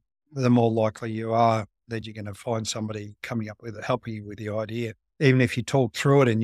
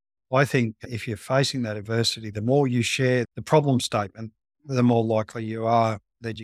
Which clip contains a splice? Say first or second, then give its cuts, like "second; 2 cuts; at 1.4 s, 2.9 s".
first; 1 cut; at 5.0 s